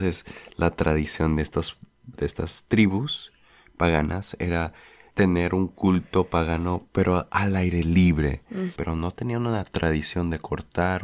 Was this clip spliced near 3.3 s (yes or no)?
no